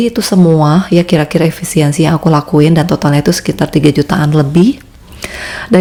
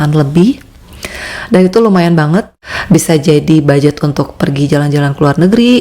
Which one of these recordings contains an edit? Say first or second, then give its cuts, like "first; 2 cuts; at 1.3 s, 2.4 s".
second; 1 cut; at 2.5 s